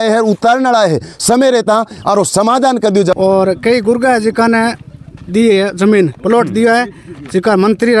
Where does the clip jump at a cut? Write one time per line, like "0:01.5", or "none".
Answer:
0:03.1